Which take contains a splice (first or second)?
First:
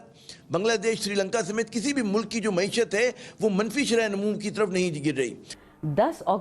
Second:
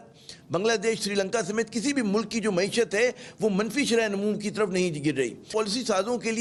first